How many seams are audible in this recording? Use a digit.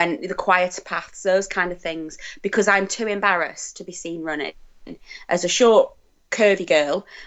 0